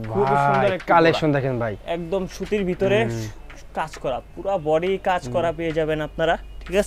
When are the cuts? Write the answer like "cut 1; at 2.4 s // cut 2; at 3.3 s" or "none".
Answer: none